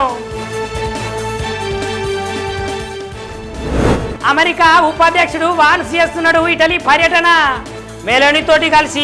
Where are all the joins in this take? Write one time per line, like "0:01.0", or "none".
none